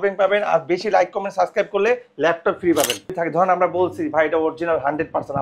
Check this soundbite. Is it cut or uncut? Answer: cut